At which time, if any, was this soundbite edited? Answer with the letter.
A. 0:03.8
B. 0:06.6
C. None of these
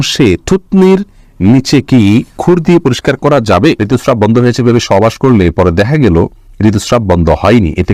A